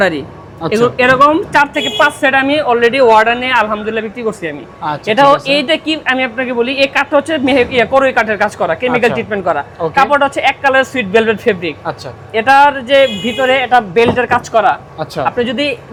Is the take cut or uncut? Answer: uncut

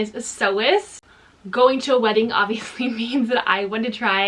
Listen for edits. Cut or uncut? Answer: cut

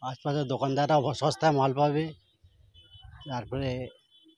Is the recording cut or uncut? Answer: uncut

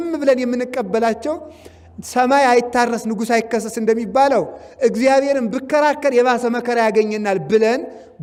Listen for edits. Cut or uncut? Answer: uncut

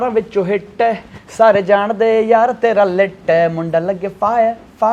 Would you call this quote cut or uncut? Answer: uncut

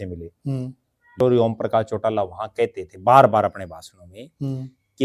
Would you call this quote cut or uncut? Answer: cut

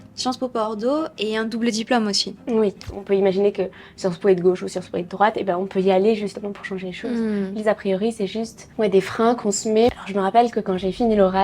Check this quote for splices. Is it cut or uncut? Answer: cut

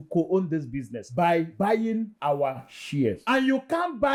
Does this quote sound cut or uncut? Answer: uncut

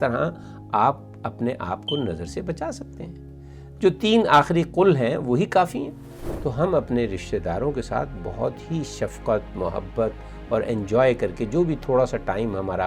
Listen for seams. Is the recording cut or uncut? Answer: cut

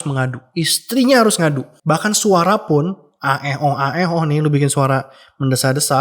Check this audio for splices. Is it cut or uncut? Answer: cut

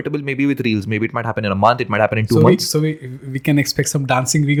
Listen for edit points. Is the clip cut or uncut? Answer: uncut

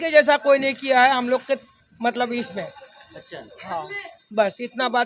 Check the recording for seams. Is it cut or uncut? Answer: uncut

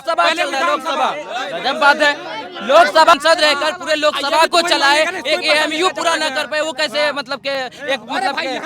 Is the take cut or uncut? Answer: cut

